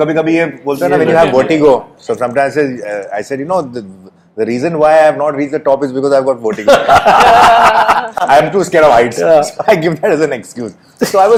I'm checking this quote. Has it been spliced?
no; 0 cuts

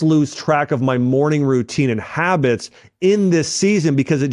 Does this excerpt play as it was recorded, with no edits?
yes; 0 cuts

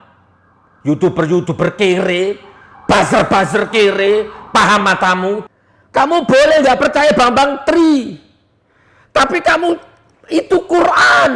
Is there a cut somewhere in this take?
yes; 1 cut; at 5.4 s

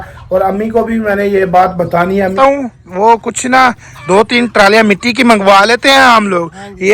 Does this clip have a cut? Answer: yes; 1 cut; at 2.3 s

